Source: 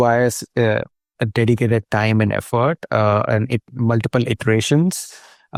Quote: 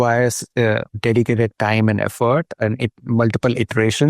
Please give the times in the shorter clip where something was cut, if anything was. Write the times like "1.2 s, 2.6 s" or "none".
0.9 s, 2.6 s